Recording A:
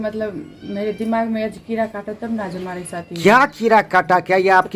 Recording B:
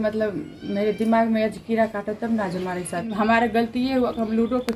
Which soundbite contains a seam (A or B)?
B